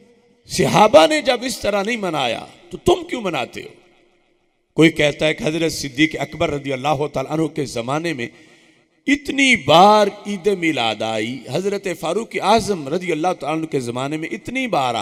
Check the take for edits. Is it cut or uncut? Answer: uncut